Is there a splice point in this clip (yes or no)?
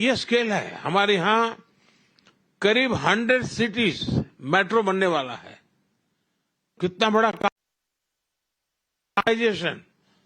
yes